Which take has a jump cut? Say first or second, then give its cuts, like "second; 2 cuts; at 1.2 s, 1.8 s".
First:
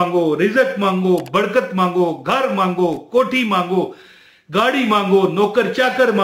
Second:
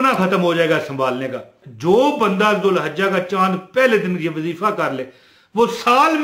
second; 1 cut; at 1.6 s